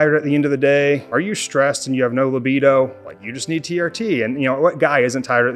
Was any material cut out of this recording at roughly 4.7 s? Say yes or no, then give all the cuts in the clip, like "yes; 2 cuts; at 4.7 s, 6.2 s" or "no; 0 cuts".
no; 1 cut; at 1.1 s